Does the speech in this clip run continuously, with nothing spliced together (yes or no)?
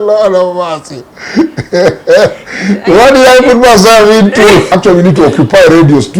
no